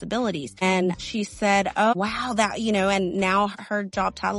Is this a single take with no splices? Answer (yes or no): no